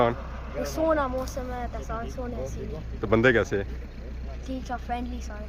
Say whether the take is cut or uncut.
uncut